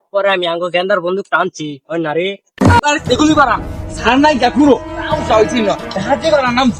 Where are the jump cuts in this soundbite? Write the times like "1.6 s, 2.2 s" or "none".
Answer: 2.8 s